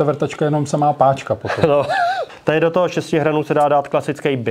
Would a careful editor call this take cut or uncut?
cut